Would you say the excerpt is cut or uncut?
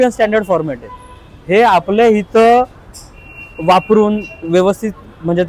uncut